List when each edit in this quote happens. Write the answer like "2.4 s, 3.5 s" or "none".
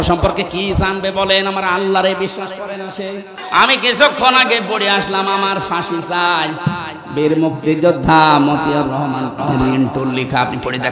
3.3 s